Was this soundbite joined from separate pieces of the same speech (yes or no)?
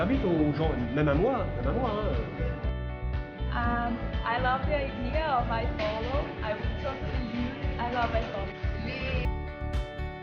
yes